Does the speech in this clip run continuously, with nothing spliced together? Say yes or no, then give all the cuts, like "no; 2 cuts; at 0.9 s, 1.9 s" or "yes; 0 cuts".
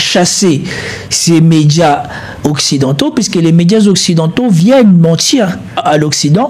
yes; 0 cuts